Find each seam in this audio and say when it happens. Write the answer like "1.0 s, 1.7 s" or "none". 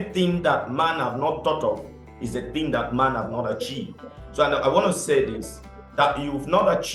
none